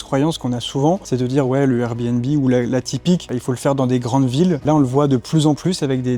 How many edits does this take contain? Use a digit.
3